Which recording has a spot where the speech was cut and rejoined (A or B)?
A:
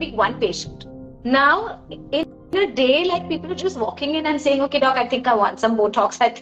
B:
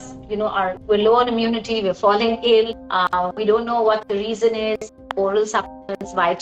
B